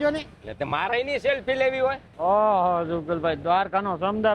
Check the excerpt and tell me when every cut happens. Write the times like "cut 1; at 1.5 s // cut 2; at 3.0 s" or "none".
cut 1; at 2.1 s